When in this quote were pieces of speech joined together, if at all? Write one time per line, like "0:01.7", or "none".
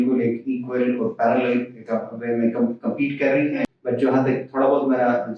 0:03.7